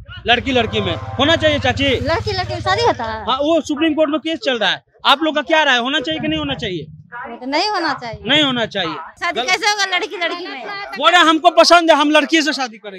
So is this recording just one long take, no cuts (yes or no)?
no